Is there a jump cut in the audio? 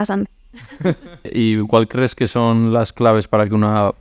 yes; 1 cut; at 1.3 s

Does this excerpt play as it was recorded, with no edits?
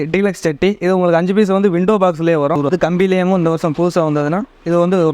no; 1 cut; at 2.6 s

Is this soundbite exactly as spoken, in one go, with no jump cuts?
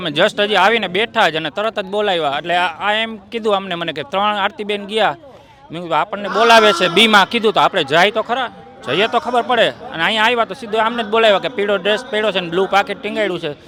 yes; 0 cuts

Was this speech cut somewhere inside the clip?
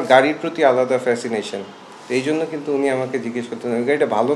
no; 0 cuts

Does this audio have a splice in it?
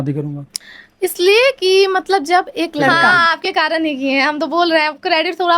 yes; 1 cut; at 3.2 s

